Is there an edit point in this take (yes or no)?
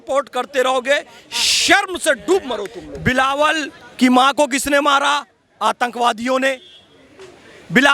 yes